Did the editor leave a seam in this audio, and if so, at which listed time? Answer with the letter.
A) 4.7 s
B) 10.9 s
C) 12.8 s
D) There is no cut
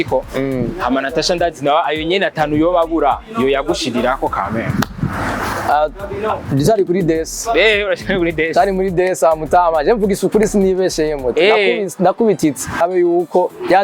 C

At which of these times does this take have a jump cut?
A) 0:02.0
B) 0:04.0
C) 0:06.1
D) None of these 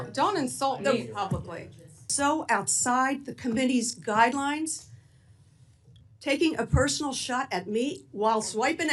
A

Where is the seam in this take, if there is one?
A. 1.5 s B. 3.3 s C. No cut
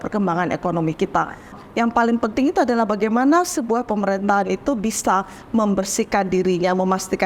A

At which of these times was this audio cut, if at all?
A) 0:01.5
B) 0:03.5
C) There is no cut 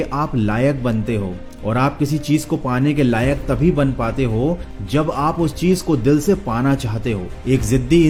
C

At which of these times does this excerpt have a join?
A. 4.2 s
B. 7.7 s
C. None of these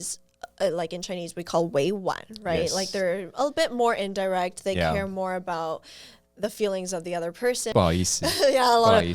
B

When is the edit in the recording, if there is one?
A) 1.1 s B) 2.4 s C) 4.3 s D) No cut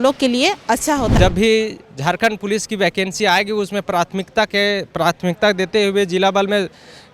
A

